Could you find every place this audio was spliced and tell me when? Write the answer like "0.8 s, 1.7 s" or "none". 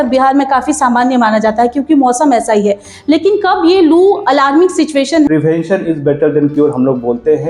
5.3 s